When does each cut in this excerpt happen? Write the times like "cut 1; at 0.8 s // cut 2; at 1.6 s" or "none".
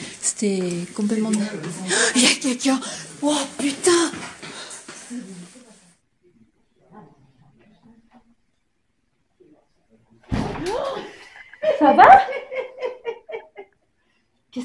cut 1; at 5.6 s